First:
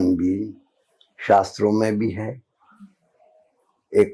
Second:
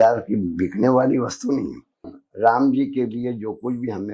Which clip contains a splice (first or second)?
second